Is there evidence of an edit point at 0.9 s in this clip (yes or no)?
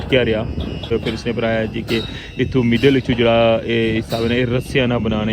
yes